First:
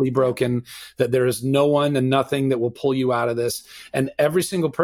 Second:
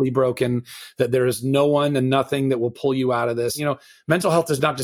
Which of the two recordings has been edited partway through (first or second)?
second